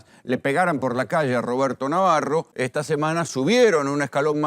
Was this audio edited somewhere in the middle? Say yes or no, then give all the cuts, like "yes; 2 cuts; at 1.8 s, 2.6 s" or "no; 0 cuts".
yes; 1 cut; at 2.6 s